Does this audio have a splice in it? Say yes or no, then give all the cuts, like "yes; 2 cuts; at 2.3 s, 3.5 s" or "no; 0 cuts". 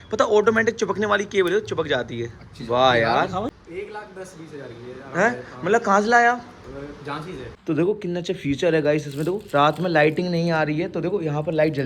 yes; 2 cuts; at 3.5 s, 7.5 s